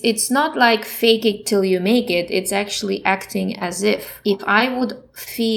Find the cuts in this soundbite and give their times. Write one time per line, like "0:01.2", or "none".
0:00.9
0:04.1